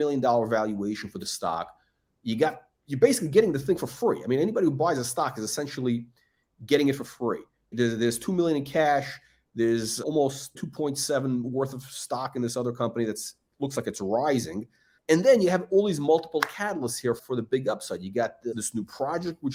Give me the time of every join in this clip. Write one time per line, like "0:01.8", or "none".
none